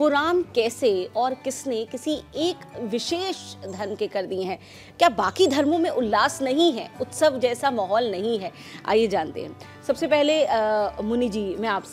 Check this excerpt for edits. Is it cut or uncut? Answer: uncut